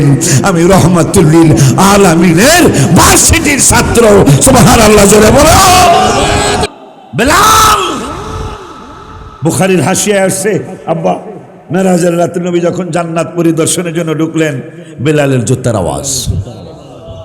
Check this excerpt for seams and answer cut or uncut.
cut